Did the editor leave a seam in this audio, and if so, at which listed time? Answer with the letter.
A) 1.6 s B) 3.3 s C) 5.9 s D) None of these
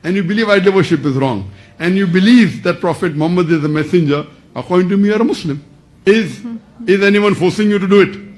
C